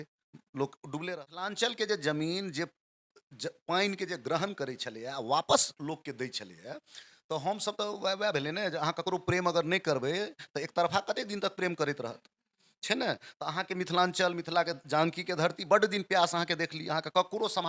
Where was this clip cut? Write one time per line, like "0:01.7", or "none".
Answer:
0:01.1